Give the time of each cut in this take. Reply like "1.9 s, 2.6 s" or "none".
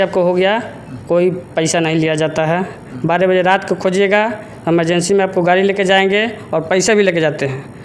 none